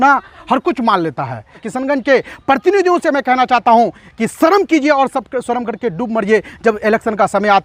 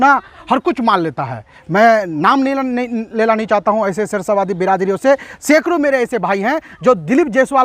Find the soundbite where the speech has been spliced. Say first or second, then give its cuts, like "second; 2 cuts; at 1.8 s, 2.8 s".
first; 1 cut; at 1.6 s